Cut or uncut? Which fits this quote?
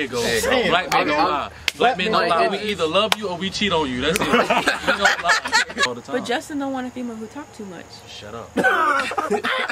cut